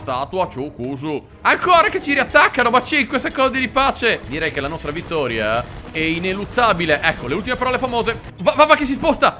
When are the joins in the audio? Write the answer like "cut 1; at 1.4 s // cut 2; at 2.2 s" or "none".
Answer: cut 1; at 1.3 s // cut 2; at 4.3 s // cut 3; at 8.3 s